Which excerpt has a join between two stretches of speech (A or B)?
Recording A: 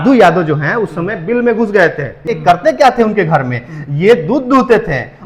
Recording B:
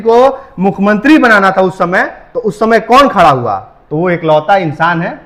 A